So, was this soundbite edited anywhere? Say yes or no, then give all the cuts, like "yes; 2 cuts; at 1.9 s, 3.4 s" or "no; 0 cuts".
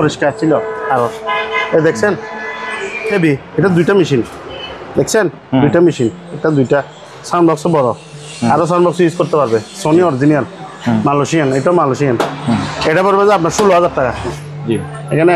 yes; 2 cuts; at 3.1 s, 14.3 s